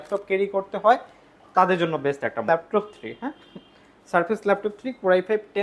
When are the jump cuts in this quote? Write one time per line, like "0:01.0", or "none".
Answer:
0:02.5